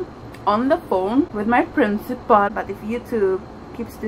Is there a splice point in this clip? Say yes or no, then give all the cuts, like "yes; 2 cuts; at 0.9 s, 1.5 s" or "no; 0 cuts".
yes; 2 cuts; at 1.3 s, 2.5 s